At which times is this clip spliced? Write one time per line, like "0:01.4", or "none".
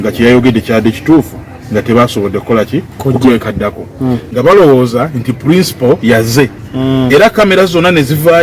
0:04.2